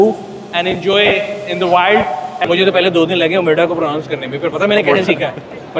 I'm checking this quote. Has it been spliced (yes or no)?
yes